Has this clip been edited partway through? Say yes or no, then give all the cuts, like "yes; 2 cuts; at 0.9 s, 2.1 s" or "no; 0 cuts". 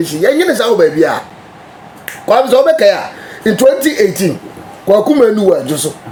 no; 0 cuts